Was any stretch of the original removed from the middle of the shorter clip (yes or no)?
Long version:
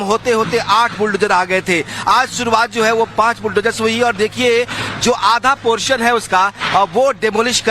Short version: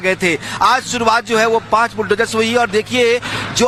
no